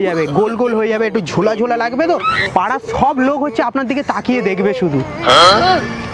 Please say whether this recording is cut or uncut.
uncut